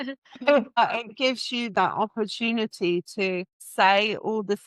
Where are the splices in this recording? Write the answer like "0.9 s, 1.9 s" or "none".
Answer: 0.8 s, 3.6 s